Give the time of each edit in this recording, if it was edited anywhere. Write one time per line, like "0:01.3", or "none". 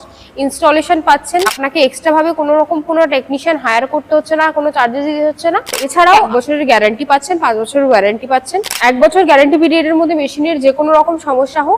0:01.6
0:06.1
0:08.6